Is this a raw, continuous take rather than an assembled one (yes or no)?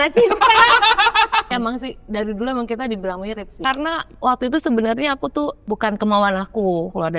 no